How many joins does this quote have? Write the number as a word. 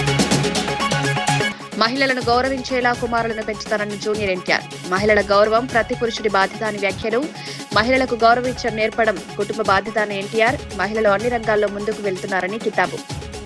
one